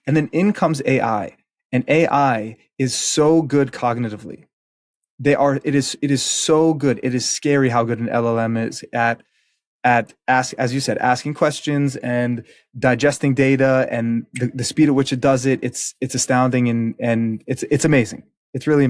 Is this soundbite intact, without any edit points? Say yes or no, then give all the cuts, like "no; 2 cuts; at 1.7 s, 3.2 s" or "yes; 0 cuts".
yes; 0 cuts